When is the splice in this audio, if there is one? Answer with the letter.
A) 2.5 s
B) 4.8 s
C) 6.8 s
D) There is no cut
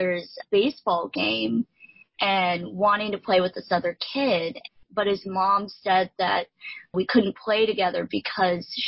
B